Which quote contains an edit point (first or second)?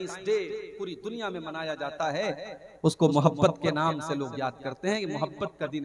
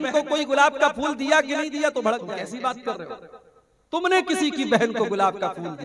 second